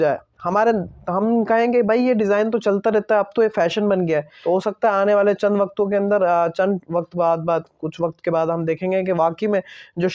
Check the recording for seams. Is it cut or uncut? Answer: cut